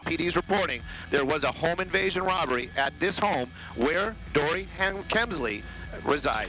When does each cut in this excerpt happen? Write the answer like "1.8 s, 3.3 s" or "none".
none